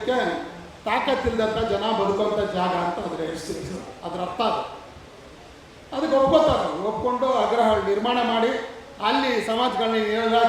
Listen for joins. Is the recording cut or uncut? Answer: uncut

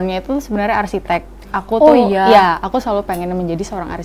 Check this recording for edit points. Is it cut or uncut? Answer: uncut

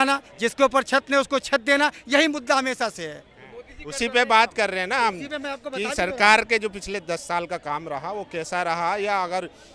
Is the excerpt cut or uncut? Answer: uncut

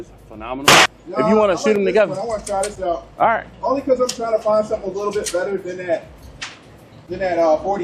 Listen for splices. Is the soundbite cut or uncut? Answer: cut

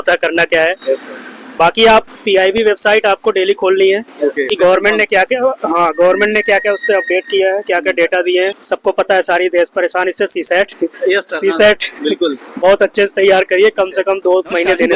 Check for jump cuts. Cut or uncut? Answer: cut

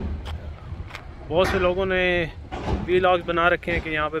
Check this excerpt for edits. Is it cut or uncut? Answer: uncut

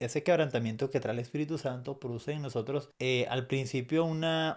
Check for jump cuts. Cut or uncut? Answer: cut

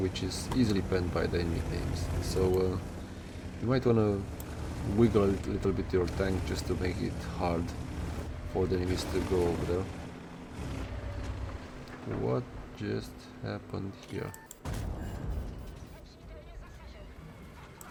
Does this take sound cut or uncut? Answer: uncut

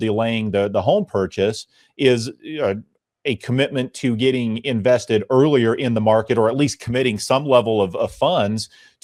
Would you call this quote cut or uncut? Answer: uncut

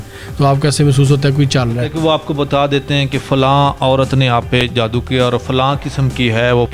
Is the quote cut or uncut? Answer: cut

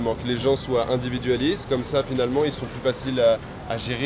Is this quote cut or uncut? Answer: uncut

